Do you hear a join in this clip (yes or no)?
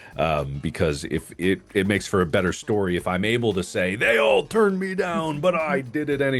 no